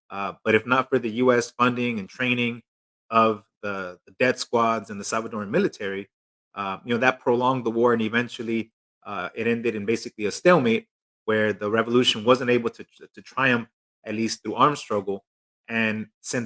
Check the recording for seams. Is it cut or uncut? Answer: uncut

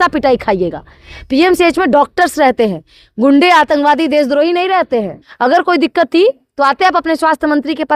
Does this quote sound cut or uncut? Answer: cut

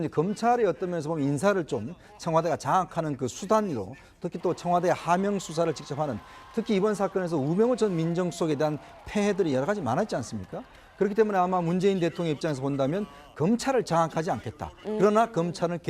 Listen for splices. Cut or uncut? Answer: cut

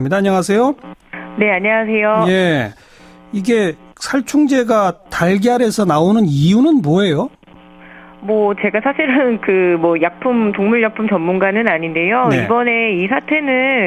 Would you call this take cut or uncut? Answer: uncut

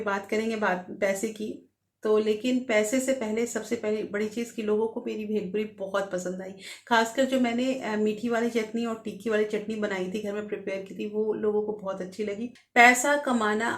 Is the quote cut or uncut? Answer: cut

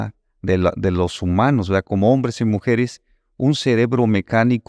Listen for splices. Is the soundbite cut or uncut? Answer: uncut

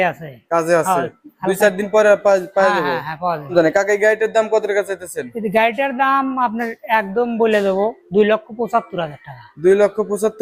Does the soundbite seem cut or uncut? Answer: cut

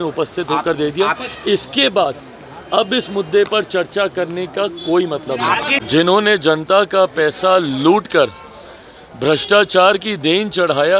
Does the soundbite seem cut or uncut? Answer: cut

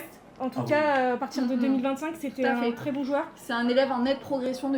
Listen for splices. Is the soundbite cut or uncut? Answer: uncut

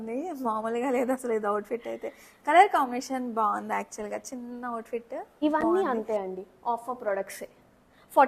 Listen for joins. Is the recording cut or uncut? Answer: cut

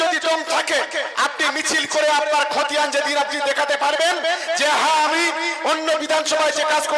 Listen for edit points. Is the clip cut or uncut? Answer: cut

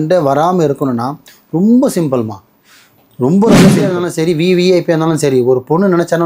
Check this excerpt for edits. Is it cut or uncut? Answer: cut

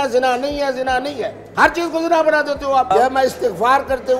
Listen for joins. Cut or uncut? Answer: cut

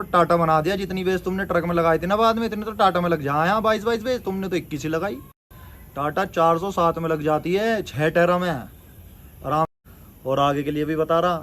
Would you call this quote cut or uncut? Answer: uncut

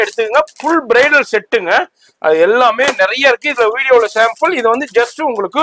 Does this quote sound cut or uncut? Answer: uncut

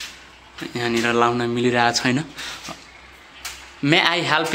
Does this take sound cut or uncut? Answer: uncut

